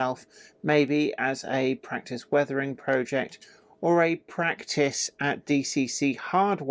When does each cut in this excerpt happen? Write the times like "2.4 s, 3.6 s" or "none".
none